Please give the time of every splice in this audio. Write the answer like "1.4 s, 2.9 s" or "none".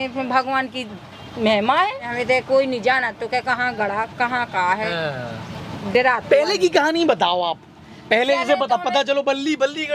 2.1 s